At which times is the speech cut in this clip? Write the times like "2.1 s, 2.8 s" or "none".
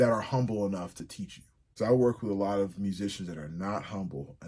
1.1 s

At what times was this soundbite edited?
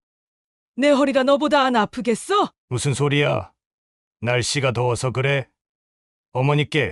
2.6 s

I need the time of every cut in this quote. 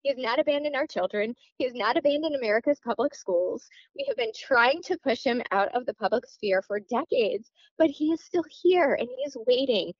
none

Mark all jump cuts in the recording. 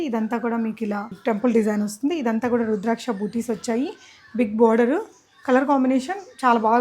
1.1 s

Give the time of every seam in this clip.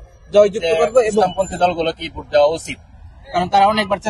1.2 s

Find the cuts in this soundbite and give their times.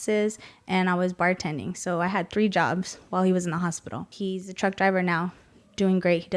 4.1 s

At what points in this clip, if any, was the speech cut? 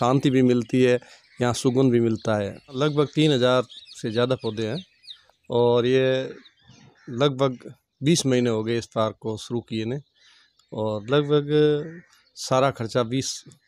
2.8 s

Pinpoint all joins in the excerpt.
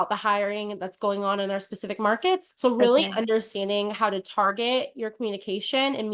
2.5 s

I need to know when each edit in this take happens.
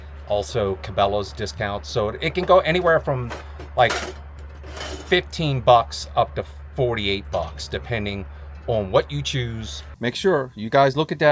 9.8 s

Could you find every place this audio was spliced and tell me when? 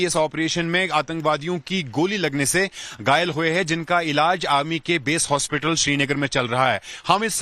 5.7 s

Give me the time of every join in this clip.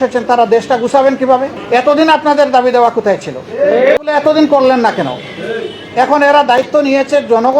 1.6 s, 4.0 s

